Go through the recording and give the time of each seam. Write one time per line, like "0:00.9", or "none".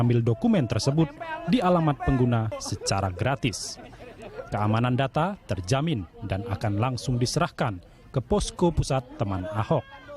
0:03.8

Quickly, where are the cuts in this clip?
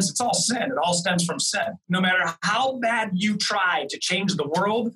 0:01.8

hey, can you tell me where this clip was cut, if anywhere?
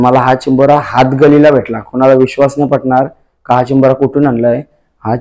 none

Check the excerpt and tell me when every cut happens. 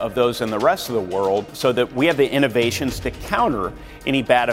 0:01.6

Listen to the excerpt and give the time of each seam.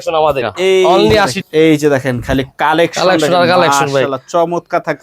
0:01.4

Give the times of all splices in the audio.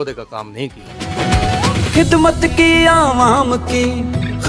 0:01.1

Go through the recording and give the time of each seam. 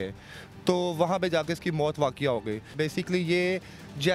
0:02.7

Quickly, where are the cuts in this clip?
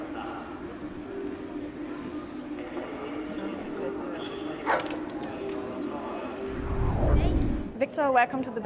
0:02.7

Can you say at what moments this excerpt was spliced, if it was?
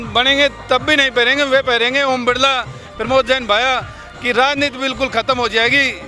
none

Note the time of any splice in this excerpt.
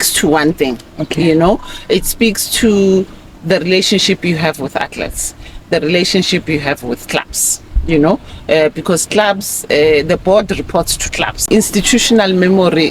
0:11.4

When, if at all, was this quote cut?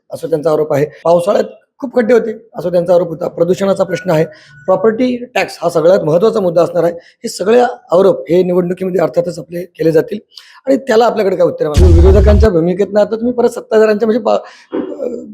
0:01.0
0:11.8

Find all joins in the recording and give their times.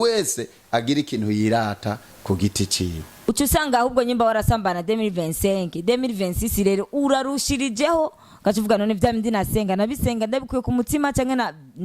0:03.3

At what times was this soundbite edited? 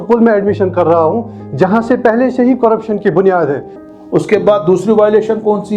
0:03.7

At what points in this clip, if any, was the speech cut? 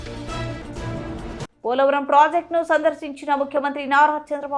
0:01.4

